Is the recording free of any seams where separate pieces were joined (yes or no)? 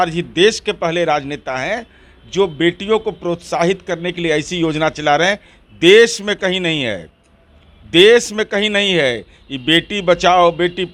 yes